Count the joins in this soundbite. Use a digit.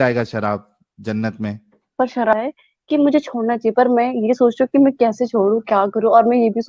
1